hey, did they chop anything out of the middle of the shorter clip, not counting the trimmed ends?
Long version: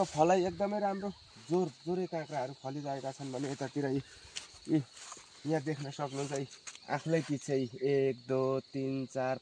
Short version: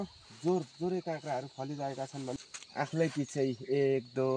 yes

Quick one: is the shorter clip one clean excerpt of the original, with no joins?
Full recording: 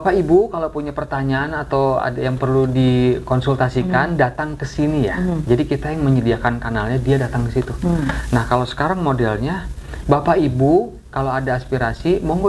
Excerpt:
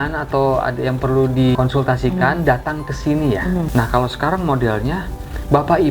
no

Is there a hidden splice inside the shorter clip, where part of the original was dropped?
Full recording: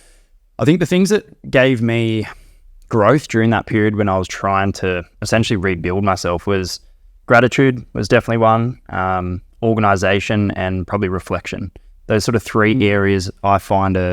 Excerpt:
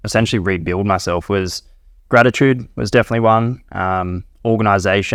no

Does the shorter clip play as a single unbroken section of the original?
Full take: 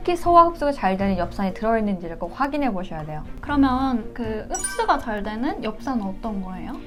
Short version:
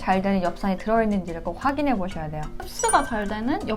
no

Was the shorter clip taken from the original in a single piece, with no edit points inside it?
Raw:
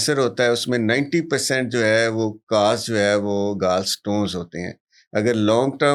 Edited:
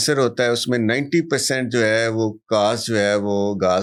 yes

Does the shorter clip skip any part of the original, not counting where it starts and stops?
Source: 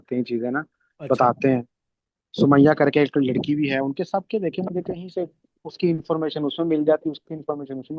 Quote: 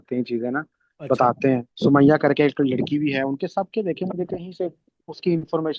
yes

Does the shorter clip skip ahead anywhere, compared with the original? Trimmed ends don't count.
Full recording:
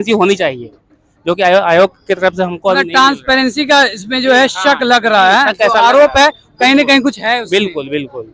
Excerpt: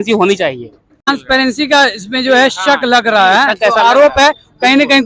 yes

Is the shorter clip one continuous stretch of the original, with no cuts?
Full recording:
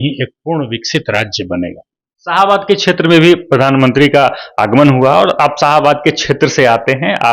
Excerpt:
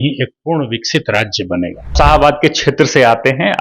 no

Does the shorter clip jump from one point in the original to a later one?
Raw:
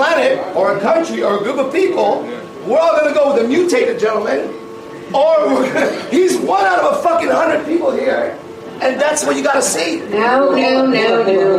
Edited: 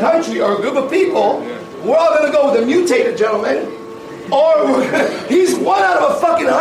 no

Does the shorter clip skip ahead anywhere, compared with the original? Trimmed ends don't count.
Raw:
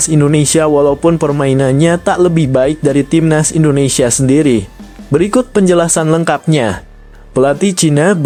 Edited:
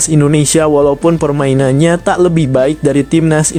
no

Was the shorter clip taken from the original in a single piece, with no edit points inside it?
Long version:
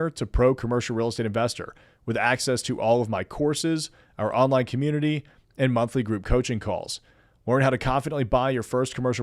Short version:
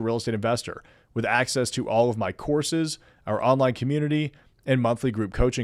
yes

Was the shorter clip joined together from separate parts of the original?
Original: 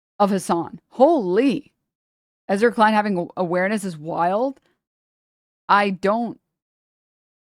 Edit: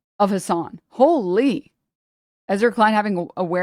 no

